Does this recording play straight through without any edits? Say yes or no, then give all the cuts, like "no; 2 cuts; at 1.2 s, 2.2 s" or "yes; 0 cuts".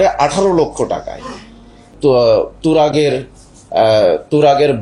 no; 1 cut; at 1.9 s